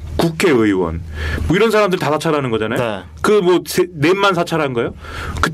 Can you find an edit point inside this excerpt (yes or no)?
no